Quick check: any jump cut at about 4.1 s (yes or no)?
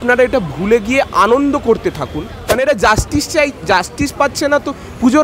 no